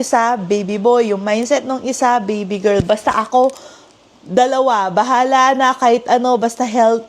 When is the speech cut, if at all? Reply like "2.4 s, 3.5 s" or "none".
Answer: none